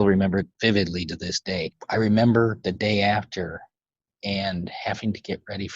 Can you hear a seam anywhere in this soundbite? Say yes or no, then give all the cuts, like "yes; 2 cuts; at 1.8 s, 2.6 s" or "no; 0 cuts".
yes; 1 cut; at 1.7 s